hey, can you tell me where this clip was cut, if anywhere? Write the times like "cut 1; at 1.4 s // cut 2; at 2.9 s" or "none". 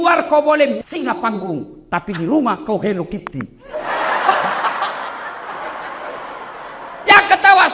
cut 1; at 5.5 s